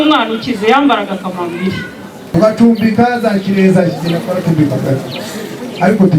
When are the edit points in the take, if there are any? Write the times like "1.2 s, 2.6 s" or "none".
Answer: 2.3 s